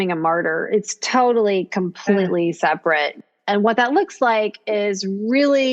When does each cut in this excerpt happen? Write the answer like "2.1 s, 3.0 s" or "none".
3.2 s